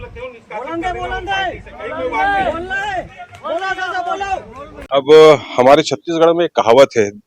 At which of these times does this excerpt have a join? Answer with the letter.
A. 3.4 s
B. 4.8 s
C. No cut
B